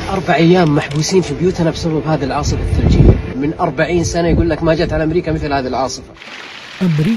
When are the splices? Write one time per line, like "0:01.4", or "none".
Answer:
0:01.5
0:06.2